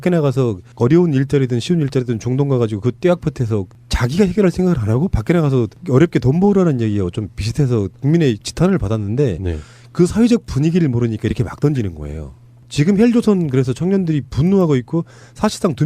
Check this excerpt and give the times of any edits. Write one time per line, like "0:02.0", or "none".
0:04.6